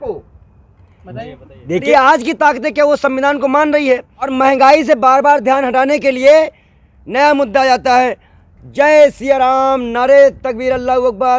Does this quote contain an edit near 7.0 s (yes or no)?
no